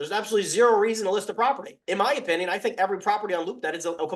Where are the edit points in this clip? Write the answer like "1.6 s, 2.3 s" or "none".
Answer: none